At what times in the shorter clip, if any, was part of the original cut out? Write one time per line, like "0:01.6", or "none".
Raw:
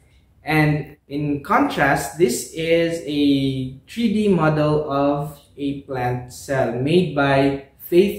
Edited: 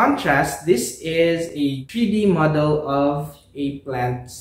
0:01.6